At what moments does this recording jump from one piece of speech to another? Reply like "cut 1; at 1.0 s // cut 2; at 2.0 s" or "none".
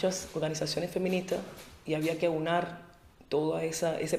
cut 1; at 1.0 s

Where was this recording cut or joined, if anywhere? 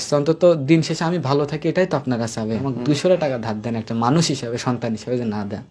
cut 1; at 2.7 s

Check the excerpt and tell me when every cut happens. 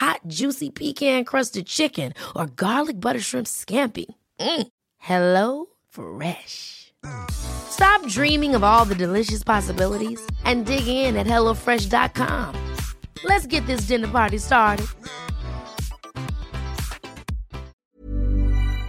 cut 1; at 17.8 s

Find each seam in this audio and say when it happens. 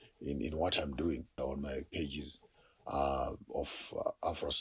cut 1; at 1.3 s

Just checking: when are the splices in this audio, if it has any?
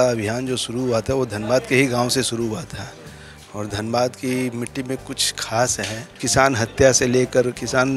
cut 1; at 6.2 s

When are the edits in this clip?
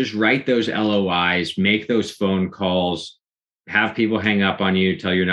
none

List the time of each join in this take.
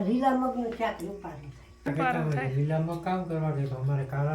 cut 1; at 1.9 s

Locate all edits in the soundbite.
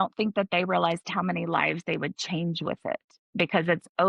none

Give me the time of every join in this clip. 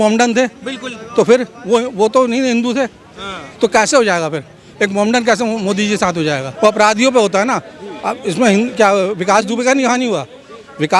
cut 1; at 6.5 s

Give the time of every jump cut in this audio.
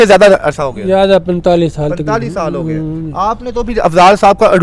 none

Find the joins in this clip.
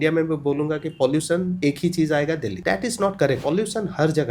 cut 1; at 1.5 s // cut 2; at 2.6 s // cut 3; at 3.4 s

